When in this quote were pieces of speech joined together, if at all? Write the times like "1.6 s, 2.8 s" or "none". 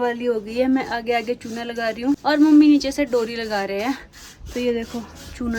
none